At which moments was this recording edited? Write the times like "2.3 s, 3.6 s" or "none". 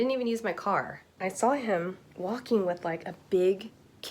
1.1 s